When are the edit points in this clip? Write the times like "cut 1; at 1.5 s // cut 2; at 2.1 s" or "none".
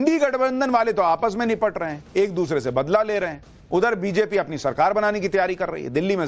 cut 1; at 2.1 s